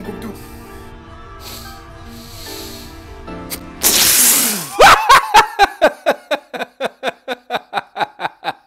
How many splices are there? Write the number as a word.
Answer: zero